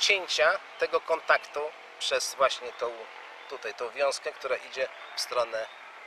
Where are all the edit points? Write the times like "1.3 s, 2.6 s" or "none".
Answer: 1.7 s